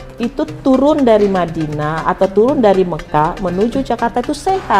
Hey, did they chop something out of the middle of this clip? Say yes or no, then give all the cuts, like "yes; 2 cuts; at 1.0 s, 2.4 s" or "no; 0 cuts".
no; 0 cuts